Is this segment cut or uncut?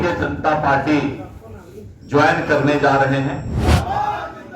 cut